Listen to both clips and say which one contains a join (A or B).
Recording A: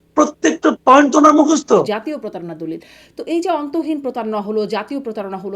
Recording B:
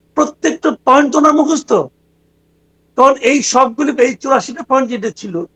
A